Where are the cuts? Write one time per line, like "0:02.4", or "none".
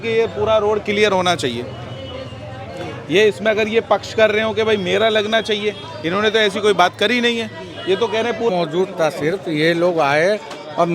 0:08.5